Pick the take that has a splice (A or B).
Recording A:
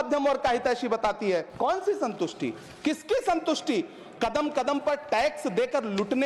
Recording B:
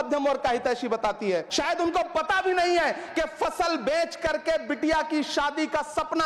B